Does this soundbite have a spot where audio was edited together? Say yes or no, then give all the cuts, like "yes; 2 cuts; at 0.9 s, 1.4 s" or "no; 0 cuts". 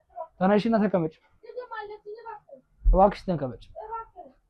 no; 0 cuts